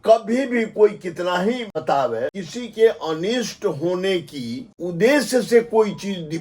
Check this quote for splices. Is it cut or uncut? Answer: cut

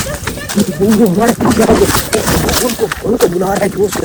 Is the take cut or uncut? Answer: uncut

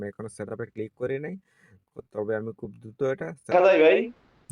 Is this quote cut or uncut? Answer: cut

